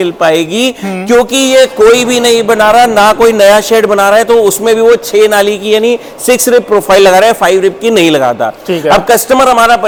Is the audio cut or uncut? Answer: uncut